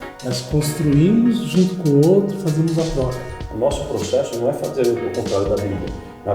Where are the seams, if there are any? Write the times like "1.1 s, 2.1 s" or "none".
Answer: 3.4 s